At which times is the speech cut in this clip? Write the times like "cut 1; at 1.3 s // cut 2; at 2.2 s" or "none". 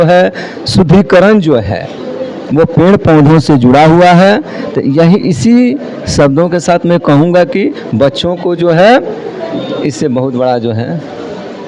none